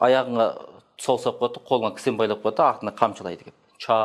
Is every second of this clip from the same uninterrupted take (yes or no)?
yes